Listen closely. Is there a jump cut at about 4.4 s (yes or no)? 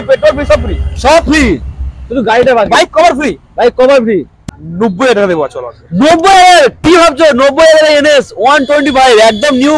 yes